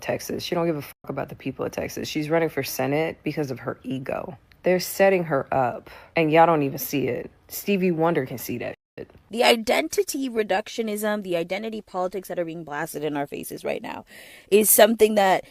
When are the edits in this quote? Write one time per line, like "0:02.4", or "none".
0:04.4
0:09.2